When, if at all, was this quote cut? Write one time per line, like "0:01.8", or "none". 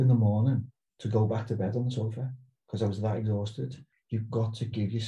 0:03.9